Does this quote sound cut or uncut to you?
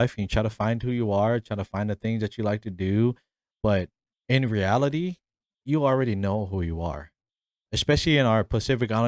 uncut